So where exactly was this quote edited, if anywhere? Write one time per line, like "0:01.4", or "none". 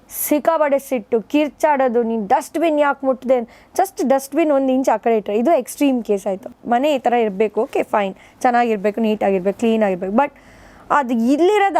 0:06.6